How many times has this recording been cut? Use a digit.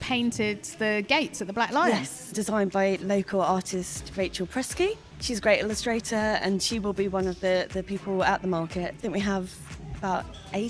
3